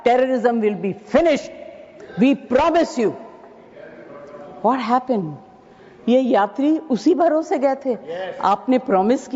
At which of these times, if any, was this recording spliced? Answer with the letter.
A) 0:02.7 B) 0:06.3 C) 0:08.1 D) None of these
D